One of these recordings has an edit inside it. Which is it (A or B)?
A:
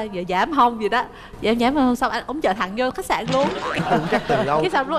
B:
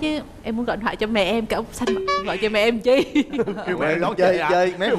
A